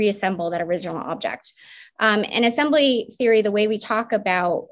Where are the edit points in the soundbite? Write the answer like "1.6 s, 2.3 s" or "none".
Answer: none